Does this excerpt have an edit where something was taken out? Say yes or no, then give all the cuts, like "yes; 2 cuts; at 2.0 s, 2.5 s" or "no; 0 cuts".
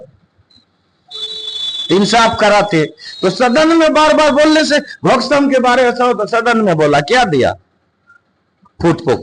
no; 0 cuts